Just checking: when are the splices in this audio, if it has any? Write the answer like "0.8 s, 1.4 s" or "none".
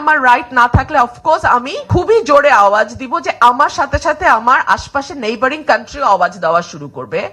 1.8 s